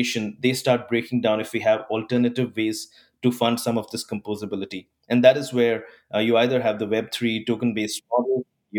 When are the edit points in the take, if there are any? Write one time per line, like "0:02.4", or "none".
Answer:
none